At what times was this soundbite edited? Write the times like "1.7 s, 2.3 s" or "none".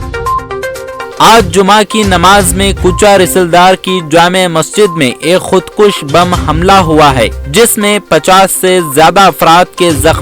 1.2 s

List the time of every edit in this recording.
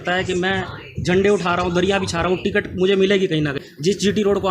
3.6 s

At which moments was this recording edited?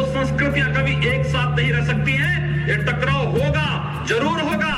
none

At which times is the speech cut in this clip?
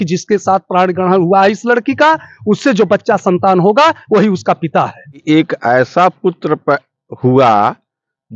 5.2 s

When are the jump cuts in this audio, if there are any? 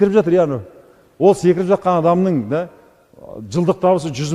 none

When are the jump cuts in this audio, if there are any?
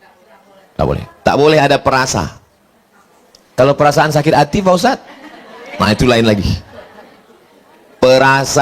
none

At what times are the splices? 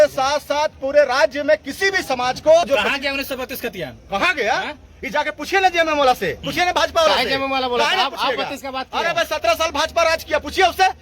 2.7 s

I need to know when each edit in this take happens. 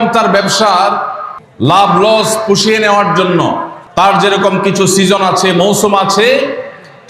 3.8 s

